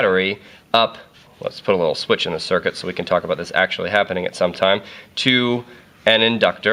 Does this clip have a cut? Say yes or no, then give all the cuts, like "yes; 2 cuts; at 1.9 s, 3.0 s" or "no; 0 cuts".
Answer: no; 0 cuts